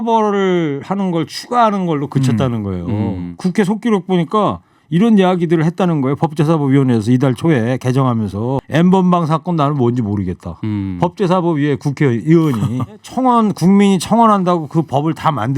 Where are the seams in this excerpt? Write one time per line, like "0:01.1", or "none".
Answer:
0:03.3
0:08.6
0:13.1